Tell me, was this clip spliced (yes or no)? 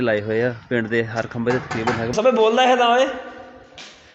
yes